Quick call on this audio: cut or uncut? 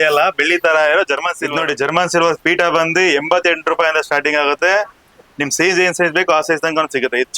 cut